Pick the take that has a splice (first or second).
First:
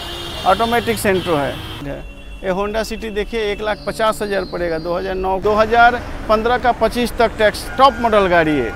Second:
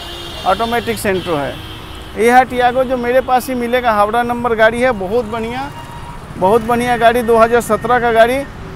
first